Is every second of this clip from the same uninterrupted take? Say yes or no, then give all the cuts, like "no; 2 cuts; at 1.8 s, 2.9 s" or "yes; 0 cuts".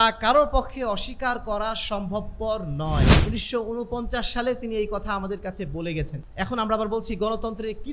no; 2 cuts; at 3.2 s, 6.2 s